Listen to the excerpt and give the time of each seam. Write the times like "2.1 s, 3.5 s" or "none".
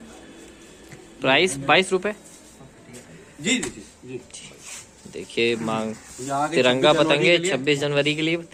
none